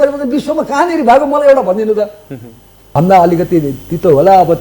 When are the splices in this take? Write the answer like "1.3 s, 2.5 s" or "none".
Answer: 2.8 s